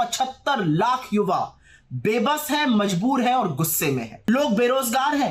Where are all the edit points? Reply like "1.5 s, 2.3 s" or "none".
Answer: 4.1 s